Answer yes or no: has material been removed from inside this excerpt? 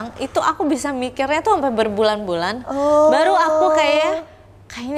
no